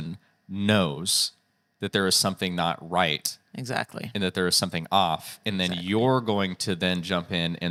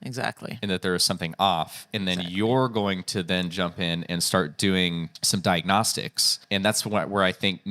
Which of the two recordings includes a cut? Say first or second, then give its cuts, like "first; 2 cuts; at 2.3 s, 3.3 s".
second; 2 cuts; at 5.1 s, 6.3 s